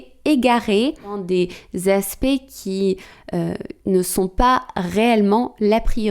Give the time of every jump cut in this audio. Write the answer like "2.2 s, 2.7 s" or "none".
1.2 s